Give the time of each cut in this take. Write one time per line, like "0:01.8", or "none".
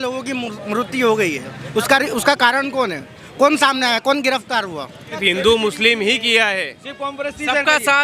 0:05.2